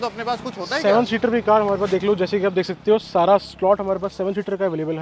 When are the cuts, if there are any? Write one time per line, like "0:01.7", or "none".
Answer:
none